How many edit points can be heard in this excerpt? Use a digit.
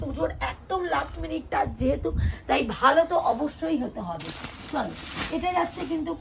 0